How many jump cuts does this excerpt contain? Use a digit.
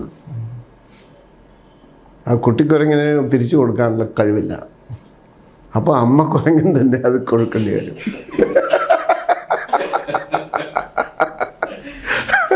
0